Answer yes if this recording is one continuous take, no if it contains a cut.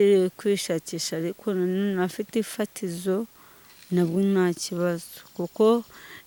yes